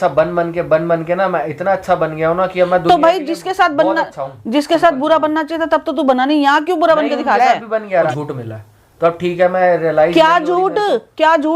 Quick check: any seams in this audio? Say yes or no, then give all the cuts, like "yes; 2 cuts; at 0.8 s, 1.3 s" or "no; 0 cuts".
yes; 1 cut; at 8.1 s